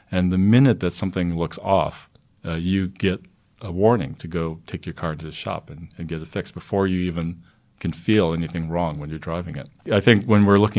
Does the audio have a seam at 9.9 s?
yes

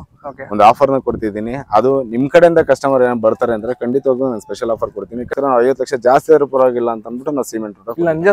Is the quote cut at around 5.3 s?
yes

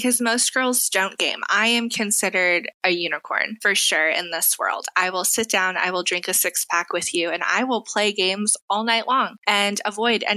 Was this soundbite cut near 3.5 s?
yes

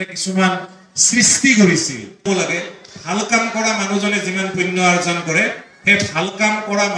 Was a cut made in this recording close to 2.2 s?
yes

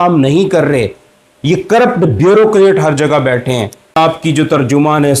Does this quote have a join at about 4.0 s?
yes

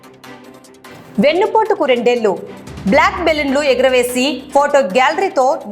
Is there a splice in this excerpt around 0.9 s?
yes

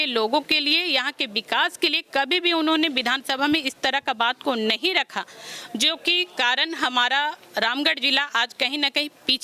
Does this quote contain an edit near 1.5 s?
no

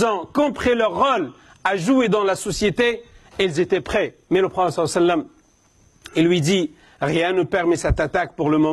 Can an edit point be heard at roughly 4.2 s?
yes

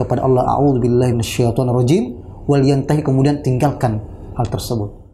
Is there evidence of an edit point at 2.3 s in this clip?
no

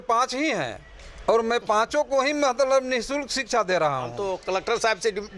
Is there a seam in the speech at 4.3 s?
yes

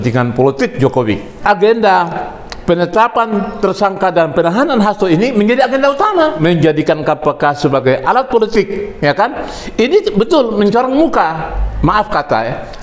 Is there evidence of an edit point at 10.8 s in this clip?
no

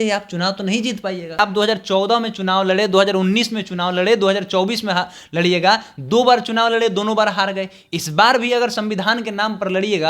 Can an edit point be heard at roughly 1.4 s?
yes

